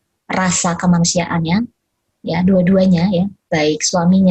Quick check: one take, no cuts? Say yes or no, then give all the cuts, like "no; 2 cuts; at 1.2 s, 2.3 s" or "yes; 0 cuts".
yes; 0 cuts